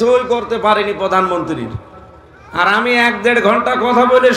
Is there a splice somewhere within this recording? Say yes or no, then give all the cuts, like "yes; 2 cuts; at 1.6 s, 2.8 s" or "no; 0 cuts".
no; 0 cuts